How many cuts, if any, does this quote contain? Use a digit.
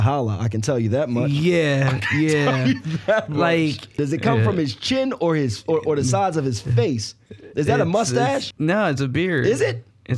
2